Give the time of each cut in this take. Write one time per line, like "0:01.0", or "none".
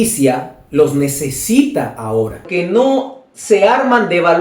0:02.5